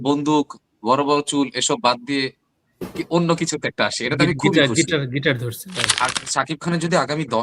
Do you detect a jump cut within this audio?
yes; 1 cut; at 6.0 s

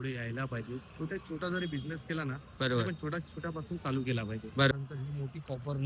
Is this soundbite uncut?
no; 1 cut; at 4.7 s

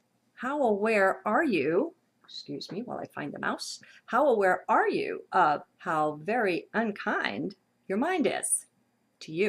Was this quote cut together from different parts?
yes; 1 cut; at 5.7 s

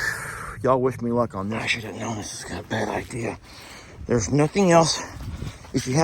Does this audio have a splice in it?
yes; 1 cut; at 1.6 s

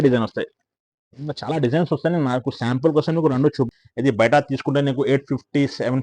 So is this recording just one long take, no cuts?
no; 1 cut; at 3.7 s

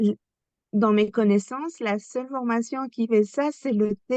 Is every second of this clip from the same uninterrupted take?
yes; 0 cuts

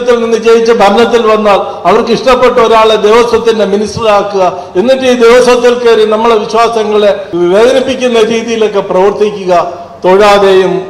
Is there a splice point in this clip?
yes; 1 cut; at 7.3 s

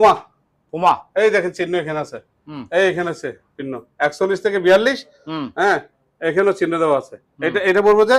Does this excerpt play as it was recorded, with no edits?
yes; 0 cuts

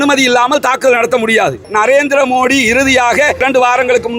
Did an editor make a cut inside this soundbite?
yes; 2 cuts; at 1.7 s, 3.4 s

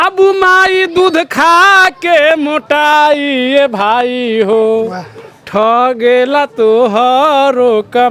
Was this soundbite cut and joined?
no; 0 cuts

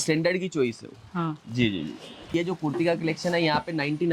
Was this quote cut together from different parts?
yes; 1 cut; at 2.3 s

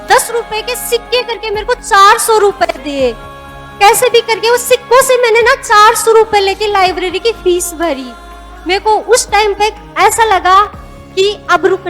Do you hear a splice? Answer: no; 0 cuts

